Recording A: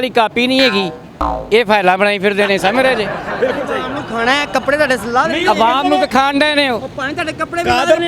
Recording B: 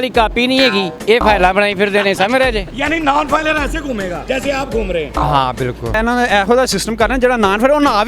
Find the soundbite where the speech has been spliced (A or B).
B